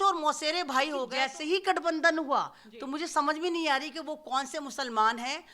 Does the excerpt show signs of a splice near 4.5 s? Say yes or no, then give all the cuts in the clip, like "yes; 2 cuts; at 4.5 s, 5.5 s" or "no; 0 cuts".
no; 1 cut; at 1.1 s